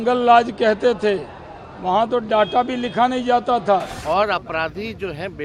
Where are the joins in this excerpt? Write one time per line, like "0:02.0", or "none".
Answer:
0:03.9